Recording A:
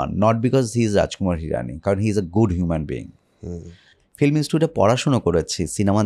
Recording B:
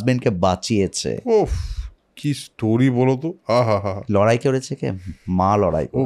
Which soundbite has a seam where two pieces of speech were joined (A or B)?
A